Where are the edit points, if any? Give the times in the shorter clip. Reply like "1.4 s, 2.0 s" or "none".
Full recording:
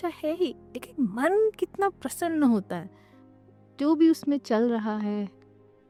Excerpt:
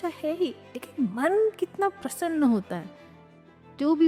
none

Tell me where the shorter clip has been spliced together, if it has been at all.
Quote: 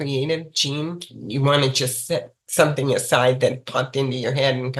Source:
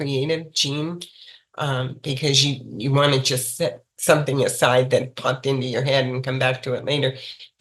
1.2 s

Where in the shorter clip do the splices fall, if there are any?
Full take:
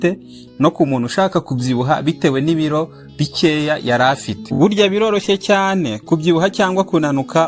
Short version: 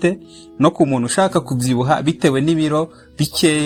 none

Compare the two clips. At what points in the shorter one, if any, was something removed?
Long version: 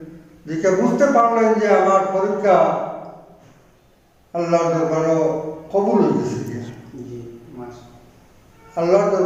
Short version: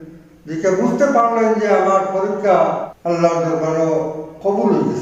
2.9 s

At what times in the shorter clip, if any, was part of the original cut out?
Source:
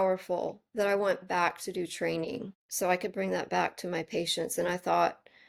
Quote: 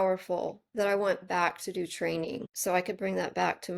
2.5 s

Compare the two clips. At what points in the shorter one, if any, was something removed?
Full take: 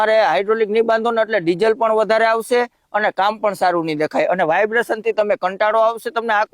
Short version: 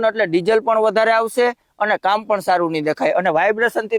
none

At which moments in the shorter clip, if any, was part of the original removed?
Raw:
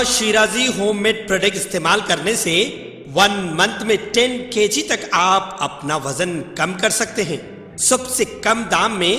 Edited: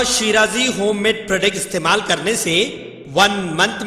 none

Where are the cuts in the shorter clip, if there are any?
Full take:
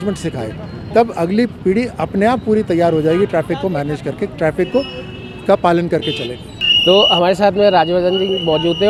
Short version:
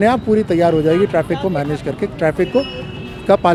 none

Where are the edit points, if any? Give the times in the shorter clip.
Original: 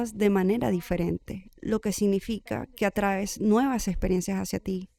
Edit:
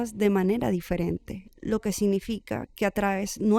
none

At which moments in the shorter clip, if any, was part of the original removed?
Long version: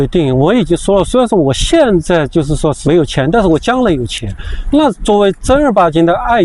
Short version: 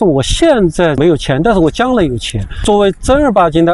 1.0 s, 2.6 s

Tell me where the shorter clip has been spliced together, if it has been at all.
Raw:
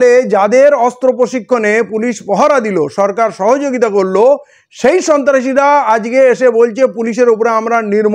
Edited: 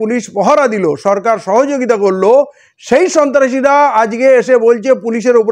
none

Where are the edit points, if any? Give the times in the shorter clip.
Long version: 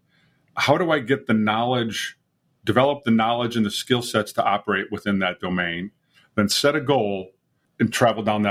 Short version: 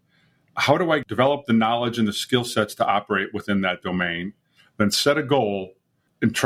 1.0 s

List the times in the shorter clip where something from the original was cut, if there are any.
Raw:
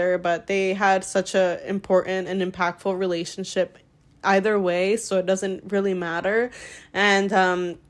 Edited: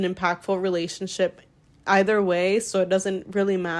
none

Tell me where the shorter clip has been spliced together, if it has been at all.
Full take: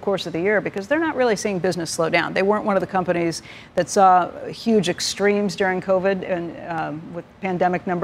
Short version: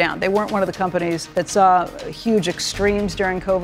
1.2 s

